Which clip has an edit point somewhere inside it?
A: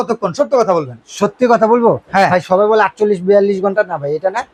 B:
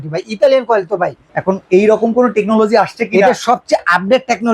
B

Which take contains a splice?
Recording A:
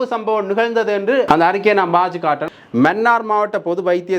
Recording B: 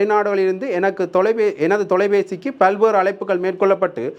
A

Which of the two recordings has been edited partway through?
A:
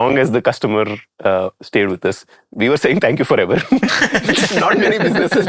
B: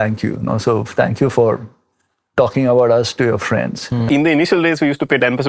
B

